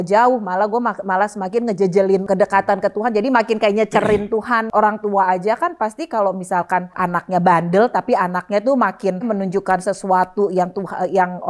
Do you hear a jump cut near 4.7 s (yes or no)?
yes